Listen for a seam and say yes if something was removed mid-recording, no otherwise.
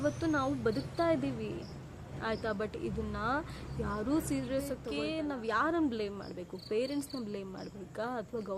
yes